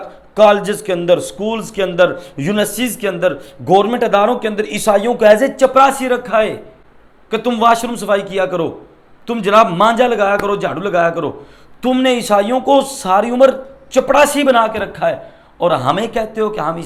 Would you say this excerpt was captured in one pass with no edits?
yes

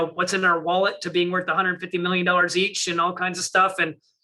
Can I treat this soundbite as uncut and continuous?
yes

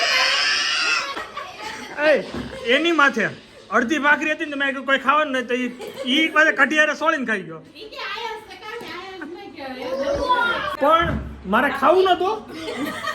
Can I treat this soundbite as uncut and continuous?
no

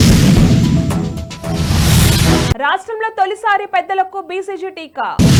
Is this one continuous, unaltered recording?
yes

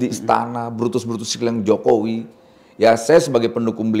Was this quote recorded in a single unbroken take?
yes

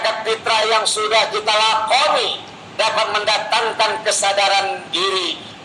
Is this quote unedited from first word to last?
yes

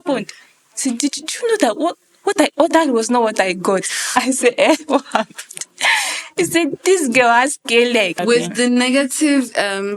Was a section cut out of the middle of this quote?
yes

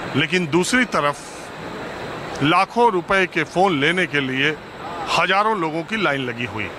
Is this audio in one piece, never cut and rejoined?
yes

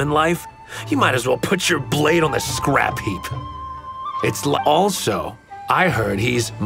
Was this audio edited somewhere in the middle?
yes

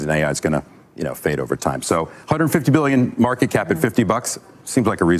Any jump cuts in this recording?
no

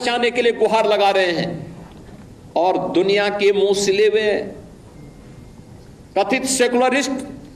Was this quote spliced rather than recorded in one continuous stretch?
no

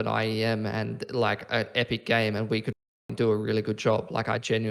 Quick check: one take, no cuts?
yes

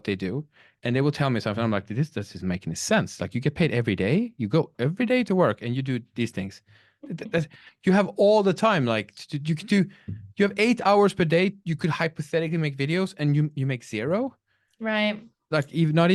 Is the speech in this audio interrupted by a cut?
no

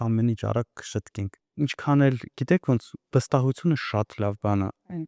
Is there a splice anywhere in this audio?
no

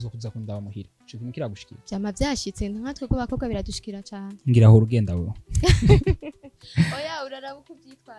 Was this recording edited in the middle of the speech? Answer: yes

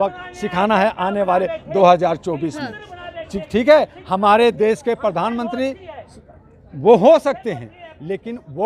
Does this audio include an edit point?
no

